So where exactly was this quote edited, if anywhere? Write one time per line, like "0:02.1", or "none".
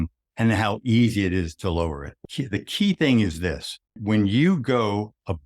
0:02.2
0:04.0